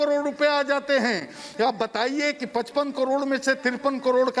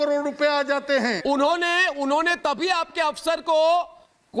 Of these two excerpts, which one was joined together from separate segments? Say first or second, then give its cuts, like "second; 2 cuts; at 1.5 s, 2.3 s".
second; 1 cut; at 1.2 s